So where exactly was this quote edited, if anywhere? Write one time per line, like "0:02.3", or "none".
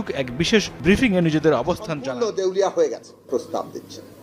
0:01.9